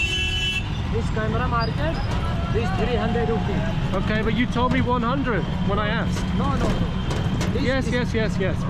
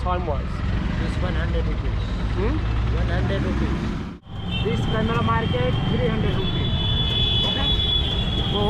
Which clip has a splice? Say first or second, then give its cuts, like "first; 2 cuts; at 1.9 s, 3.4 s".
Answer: second; 1 cut; at 4.1 s